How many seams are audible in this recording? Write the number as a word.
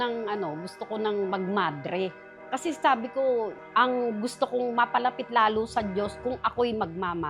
one